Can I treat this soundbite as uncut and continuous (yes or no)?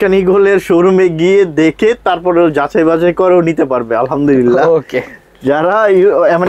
yes